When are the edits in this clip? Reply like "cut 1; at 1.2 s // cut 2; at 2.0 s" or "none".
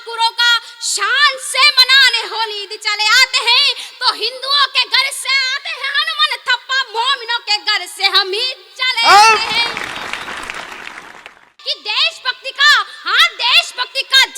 cut 1; at 11.5 s

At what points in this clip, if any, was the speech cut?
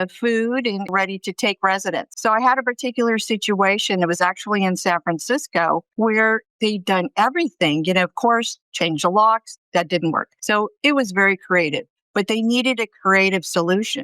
cut 1; at 2.1 s // cut 2; at 5.9 s // cut 3; at 10.3 s

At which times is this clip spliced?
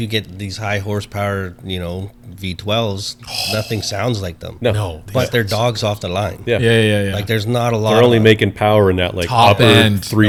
none

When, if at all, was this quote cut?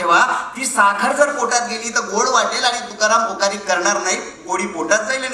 none

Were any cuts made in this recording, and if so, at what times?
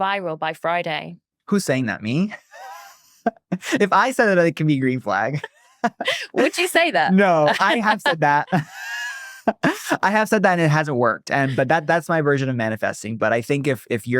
none

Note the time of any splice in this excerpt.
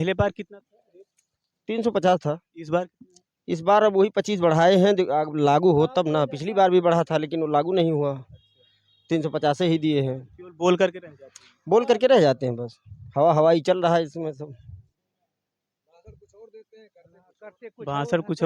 none

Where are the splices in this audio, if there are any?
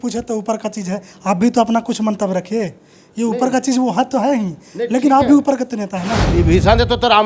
cut 1; at 6.3 s

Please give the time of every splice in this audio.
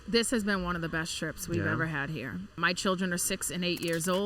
cut 1; at 2.6 s

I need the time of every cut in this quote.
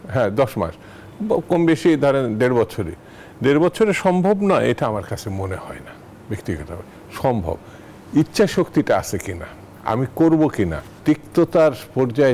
cut 1; at 10.9 s

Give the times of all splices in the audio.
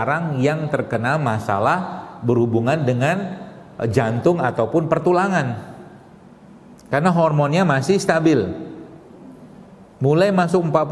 none

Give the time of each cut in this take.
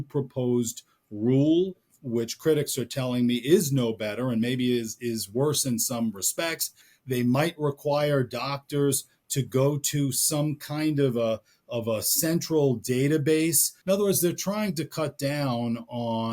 cut 1; at 1.9 s // cut 2; at 6.9 s // cut 3; at 13.7 s

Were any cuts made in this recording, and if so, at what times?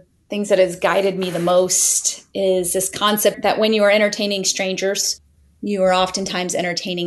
none

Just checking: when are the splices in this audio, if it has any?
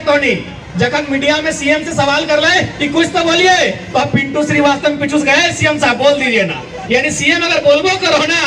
none

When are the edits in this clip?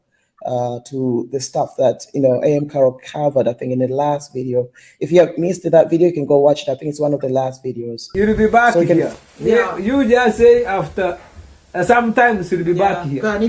cut 1; at 8.0 s

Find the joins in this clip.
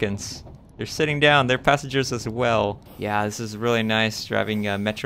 cut 1; at 2.8 s

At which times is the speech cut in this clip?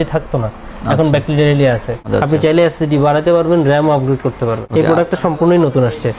cut 1; at 2.0 s // cut 2; at 4.6 s

